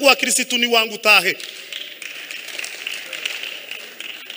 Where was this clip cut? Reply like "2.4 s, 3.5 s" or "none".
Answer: none